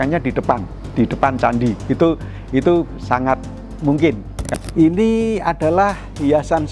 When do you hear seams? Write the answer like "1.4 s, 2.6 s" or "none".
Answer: 4.4 s